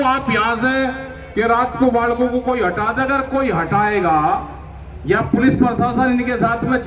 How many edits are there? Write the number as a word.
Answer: zero